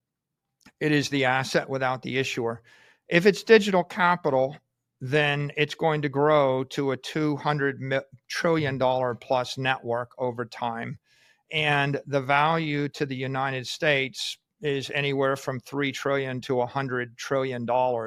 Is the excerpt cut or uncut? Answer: uncut